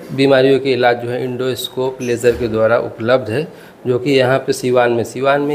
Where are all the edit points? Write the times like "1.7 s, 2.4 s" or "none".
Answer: none